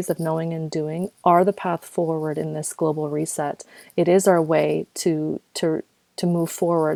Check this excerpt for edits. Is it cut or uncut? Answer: uncut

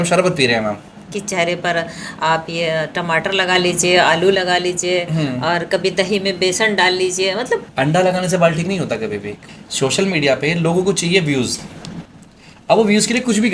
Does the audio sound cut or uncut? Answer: cut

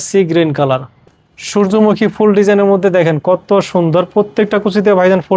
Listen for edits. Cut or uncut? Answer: cut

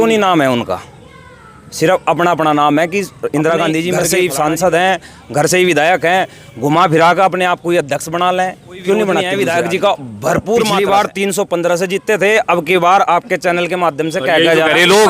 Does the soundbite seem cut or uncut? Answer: cut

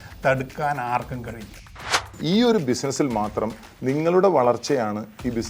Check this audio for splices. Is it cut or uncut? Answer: cut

